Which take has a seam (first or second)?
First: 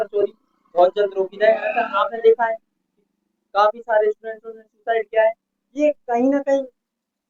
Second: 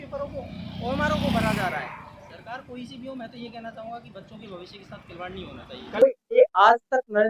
second